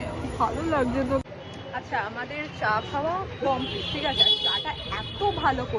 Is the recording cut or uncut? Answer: uncut